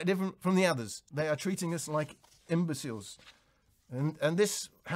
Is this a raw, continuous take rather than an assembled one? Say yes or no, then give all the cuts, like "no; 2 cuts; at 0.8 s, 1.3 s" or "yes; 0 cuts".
no; 1 cut; at 1.0 s